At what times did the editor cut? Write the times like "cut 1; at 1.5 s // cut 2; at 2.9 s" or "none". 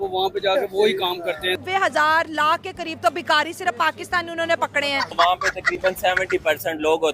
cut 1; at 1.6 s // cut 2; at 5.1 s